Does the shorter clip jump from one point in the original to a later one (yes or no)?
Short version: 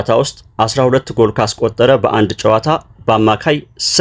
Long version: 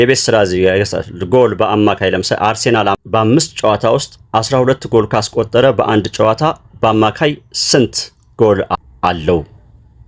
no